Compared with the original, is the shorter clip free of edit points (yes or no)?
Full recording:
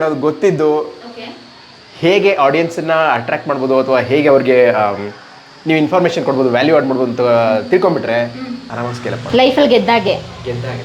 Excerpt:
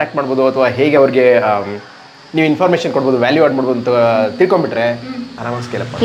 yes